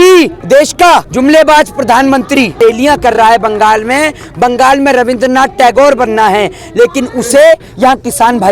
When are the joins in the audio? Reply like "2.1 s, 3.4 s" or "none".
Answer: 0.8 s, 2.6 s